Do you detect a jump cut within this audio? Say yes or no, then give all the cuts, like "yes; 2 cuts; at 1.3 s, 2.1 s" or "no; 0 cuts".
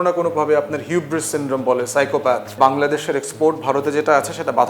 yes; 1 cut; at 2.5 s